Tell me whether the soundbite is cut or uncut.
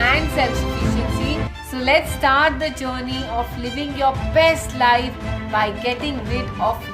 cut